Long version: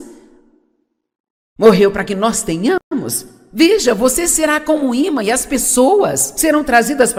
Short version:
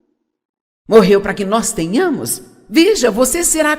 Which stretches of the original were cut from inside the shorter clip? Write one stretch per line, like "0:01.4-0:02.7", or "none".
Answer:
0:02.8-0:02.9